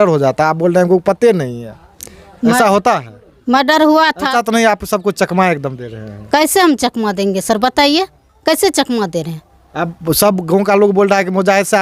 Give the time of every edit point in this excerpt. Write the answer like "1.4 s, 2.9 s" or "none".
none